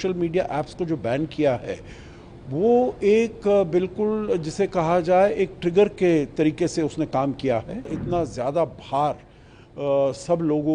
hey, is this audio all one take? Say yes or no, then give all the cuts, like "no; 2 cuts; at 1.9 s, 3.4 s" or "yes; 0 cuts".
no; 1 cut; at 8.0 s